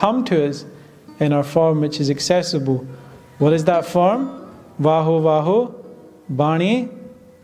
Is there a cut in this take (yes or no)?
no